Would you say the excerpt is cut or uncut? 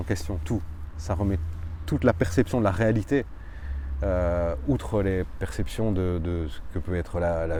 uncut